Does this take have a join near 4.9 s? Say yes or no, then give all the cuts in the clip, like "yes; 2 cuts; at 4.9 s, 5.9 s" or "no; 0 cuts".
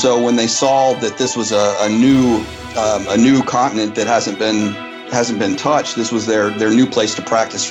no; 0 cuts